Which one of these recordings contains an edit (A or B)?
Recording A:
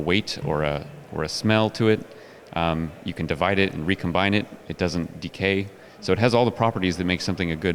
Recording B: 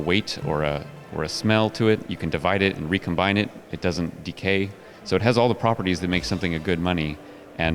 B